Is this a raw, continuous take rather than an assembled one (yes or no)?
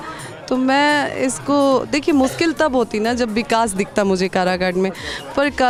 yes